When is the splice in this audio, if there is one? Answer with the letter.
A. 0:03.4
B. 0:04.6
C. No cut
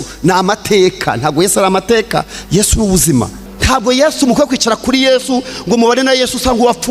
A